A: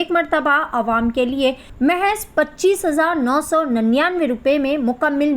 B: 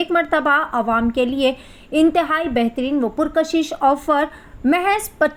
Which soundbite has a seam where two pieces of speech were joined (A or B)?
A